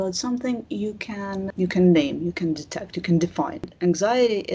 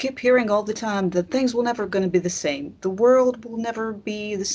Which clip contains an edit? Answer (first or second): first